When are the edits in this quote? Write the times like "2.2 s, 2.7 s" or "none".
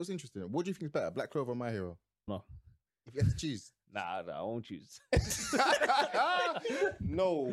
2.3 s